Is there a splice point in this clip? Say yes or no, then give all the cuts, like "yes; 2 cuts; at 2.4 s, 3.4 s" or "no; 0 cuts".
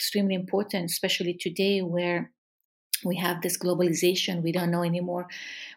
no; 0 cuts